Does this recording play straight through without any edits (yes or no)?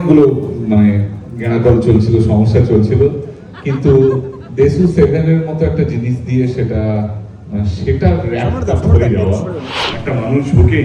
no